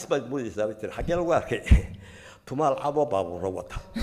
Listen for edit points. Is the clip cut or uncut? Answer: uncut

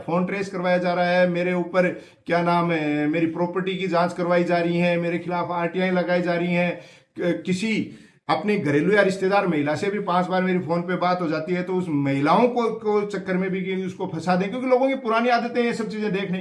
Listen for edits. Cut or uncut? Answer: uncut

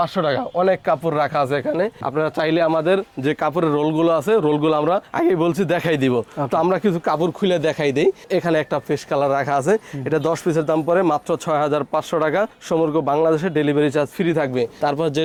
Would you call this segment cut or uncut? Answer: uncut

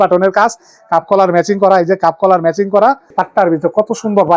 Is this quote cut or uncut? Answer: cut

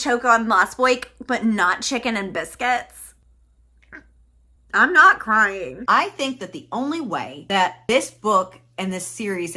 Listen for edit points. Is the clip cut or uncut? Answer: cut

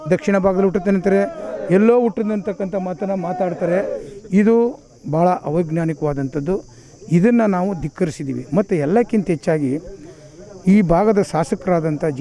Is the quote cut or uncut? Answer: uncut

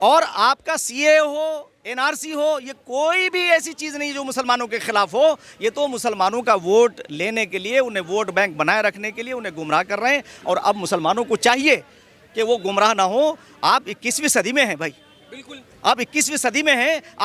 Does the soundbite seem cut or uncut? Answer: uncut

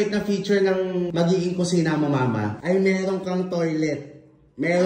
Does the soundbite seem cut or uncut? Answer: cut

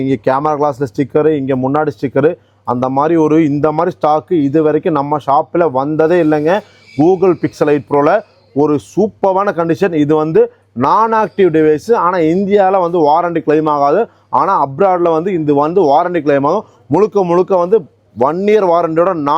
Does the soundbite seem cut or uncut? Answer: uncut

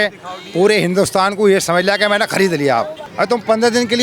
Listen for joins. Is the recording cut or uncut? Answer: cut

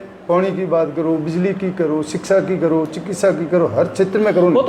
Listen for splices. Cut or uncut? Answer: uncut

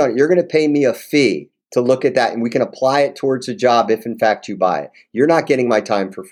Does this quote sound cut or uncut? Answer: uncut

